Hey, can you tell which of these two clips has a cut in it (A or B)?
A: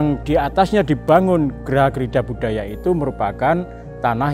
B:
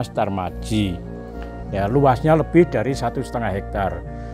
A